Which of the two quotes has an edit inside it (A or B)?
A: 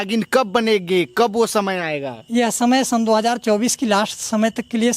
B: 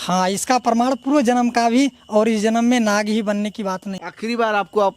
B